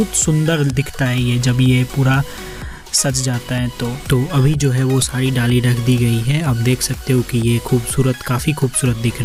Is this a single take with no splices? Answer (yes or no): yes